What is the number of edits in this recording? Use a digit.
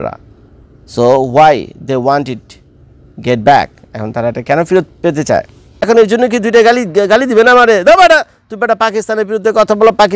1